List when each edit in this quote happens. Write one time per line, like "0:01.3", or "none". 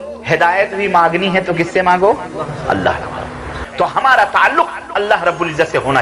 0:03.6